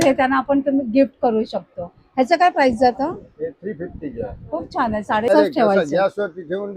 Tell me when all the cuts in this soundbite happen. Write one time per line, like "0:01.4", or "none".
0:05.3